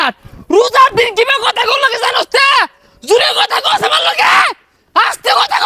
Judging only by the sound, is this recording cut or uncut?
uncut